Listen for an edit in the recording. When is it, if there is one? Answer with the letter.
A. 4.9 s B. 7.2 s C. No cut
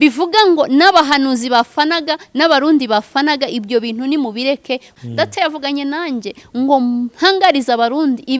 A